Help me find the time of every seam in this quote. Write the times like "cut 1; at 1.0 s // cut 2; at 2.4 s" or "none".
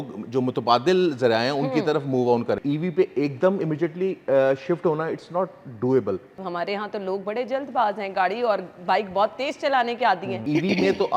cut 1; at 2.6 s // cut 2; at 6.4 s // cut 3; at 10.4 s